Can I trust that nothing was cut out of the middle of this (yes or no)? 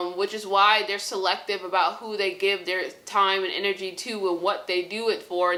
yes